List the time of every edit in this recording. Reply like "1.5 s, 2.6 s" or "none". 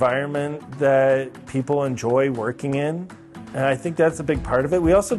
none